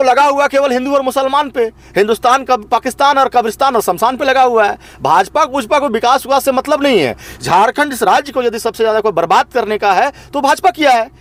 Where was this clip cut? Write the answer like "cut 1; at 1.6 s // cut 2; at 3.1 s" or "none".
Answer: none